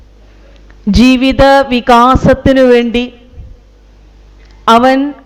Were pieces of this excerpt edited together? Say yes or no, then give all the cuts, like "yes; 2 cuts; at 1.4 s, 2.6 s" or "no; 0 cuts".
no; 0 cuts